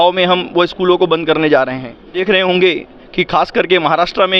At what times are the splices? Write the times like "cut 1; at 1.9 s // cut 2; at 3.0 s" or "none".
cut 1; at 2.2 s